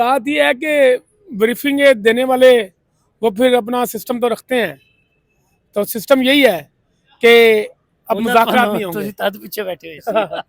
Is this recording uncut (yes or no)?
yes